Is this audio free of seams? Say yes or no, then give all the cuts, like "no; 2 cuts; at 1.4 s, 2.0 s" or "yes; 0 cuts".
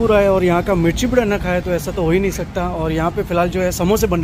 yes; 0 cuts